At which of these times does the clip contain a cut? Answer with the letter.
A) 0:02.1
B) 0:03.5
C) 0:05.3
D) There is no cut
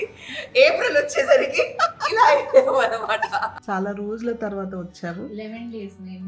B